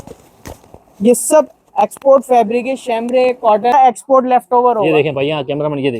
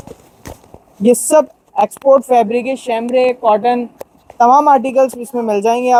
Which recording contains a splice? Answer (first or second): first